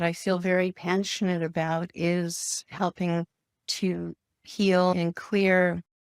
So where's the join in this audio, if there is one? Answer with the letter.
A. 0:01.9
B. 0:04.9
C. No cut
B